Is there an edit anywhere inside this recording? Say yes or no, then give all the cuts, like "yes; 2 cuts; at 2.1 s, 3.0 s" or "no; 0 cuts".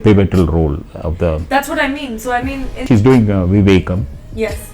yes; 1 cut; at 2.8 s